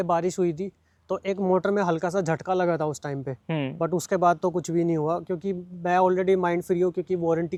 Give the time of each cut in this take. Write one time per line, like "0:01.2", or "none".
none